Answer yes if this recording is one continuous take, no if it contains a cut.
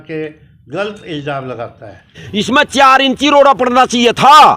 no